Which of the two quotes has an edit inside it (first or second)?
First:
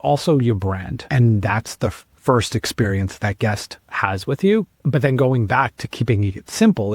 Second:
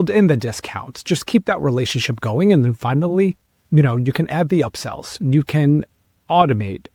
first